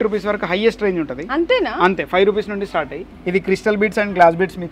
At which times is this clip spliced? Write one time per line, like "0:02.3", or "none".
none